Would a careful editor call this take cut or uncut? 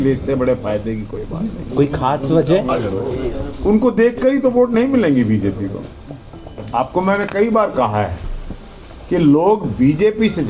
uncut